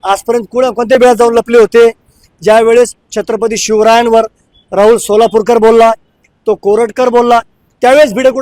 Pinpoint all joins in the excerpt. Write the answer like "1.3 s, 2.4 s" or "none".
none